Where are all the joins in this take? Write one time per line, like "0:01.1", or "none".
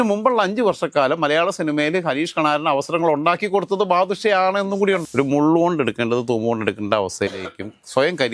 0:05.0